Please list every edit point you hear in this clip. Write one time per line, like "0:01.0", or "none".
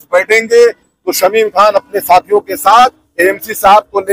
0:03.0